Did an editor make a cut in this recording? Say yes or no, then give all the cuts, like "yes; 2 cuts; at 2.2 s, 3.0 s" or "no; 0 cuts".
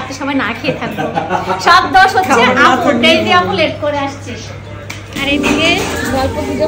yes; 1 cut; at 5.1 s